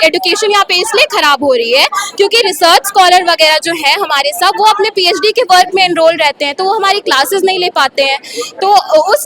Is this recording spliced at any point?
no; 0 cuts

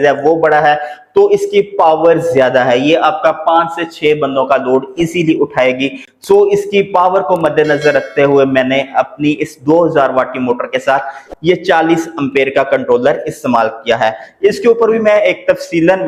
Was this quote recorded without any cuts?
yes; 0 cuts

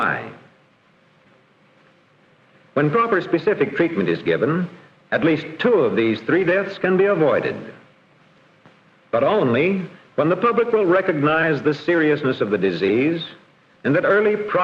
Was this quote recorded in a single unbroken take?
yes; 0 cuts

